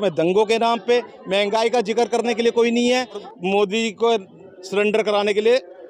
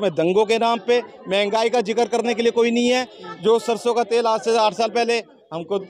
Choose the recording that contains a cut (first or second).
first